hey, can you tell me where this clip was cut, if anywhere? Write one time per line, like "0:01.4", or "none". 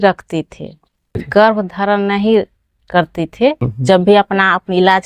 0:01.2
0:03.7

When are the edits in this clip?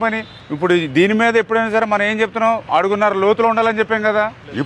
none

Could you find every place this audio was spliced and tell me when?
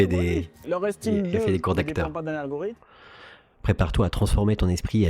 0:02.8

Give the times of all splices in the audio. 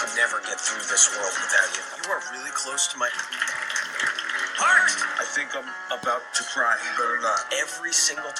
none

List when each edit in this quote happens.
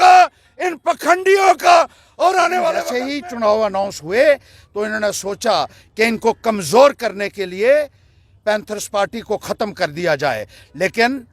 0:02.9

